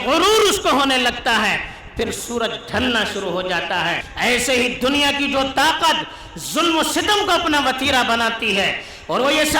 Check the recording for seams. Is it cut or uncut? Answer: cut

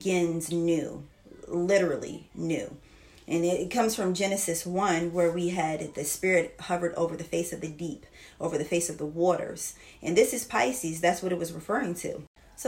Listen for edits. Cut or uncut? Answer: uncut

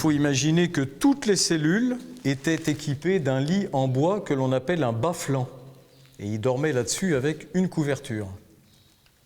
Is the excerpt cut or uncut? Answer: cut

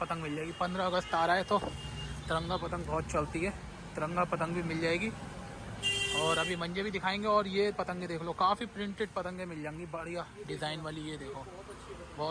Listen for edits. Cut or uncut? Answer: uncut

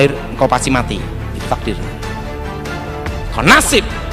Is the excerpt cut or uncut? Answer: uncut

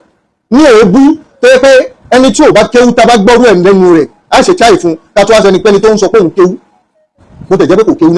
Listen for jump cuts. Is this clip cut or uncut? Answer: uncut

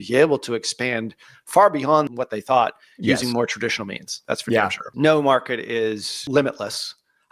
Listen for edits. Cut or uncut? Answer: cut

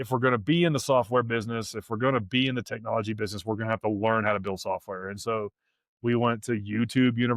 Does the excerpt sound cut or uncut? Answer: uncut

